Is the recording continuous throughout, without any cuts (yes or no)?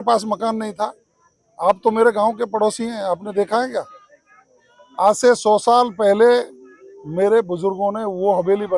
yes